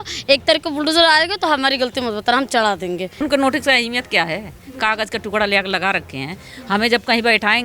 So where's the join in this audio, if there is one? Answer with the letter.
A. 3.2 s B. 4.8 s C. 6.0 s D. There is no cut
A